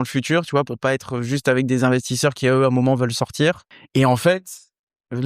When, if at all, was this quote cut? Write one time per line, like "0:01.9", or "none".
0:03.7